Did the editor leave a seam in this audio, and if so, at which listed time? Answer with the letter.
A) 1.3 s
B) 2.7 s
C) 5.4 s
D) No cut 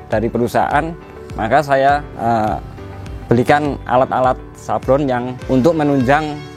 C